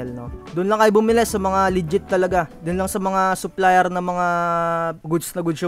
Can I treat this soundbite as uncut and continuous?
yes; 0 cuts

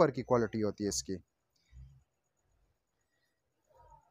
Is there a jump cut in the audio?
no; 0 cuts

